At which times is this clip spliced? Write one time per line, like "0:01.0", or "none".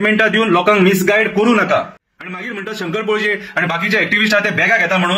0:02.0